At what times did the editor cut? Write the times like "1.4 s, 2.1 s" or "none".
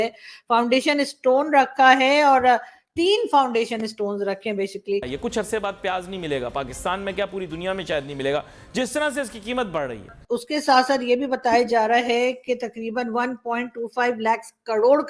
5.1 s, 10.2 s